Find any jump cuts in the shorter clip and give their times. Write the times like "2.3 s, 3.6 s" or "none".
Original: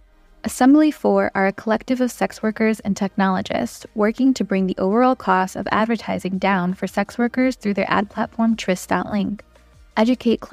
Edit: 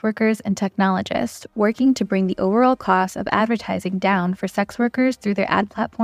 none